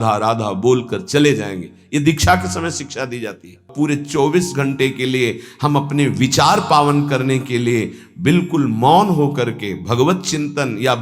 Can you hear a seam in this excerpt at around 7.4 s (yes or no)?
no